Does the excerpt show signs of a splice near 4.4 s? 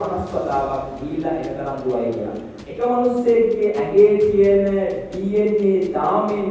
no; 1 cut; at 2.6 s

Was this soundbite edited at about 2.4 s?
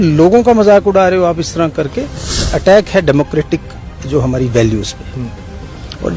yes; 1 cut; at 2.4 s

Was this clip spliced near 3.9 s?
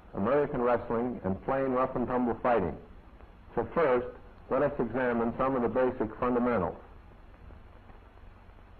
no; 1 cut; at 6.6 s

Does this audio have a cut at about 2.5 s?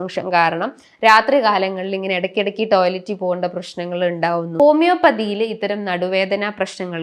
no; 1 cut; at 4.6 s

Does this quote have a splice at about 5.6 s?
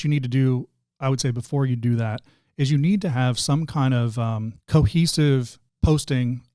yes; 2 cuts; at 4.5 s, 5.6 s

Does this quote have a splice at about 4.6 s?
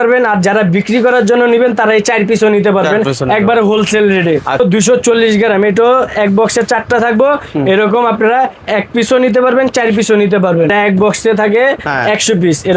yes; 2 cuts; at 4.6 s, 10.7 s

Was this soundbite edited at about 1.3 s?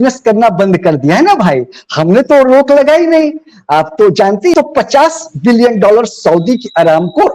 no; 1 cut; at 4.5 s

